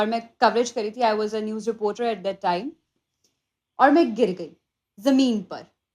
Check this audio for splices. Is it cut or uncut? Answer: cut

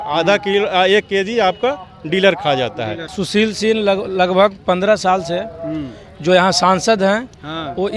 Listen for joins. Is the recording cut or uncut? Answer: cut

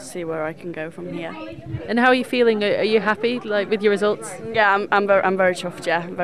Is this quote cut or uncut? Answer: uncut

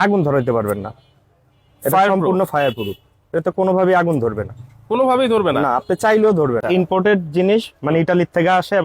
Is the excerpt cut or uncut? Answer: cut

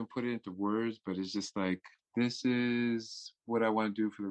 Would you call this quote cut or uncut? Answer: cut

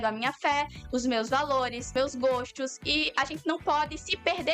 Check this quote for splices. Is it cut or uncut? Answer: cut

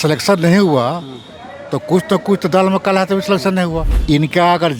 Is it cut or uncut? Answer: cut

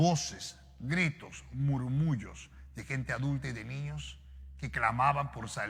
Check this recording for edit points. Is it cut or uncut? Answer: uncut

